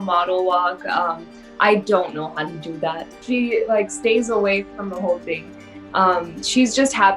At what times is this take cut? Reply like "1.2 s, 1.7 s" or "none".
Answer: 3.1 s